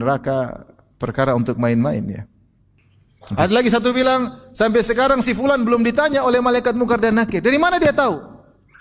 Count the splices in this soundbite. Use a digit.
1